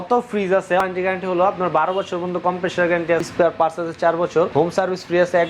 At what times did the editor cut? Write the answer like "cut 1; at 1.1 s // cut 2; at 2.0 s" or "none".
cut 1; at 0.8 s // cut 2; at 3.2 s // cut 3; at 4.5 s